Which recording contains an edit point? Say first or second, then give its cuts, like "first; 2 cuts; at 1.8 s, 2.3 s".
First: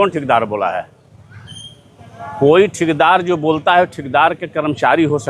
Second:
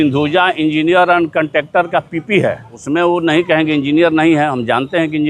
second; 1 cut; at 2.7 s